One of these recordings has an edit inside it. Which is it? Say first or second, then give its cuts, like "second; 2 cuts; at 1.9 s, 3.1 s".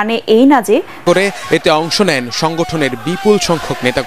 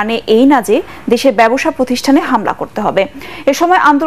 first; 1 cut; at 1.0 s